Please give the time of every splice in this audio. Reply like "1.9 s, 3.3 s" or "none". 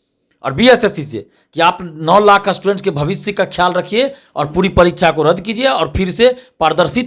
none